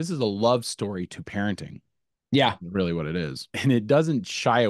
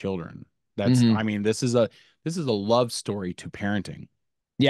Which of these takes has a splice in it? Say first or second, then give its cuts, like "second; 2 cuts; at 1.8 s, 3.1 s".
first; 1 cut; at 3.5 s